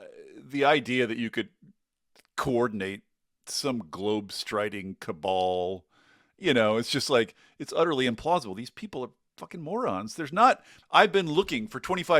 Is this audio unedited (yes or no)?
no